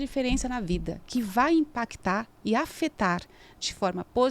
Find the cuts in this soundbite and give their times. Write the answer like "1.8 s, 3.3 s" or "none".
none